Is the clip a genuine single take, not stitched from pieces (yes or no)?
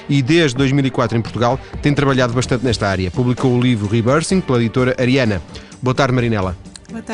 yes